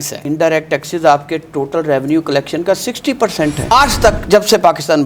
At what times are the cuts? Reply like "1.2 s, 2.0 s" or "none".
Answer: 3.6 s